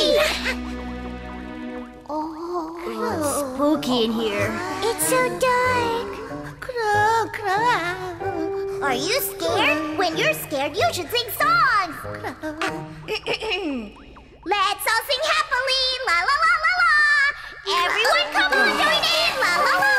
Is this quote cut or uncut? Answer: uncut